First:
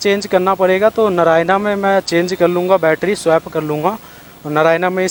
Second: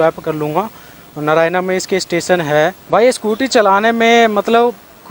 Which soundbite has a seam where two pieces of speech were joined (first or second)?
second